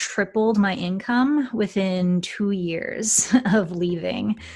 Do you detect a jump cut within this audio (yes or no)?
no